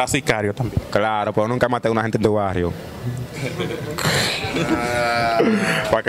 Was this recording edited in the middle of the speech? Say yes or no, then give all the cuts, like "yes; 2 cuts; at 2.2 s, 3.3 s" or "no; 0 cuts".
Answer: no; 0 cuts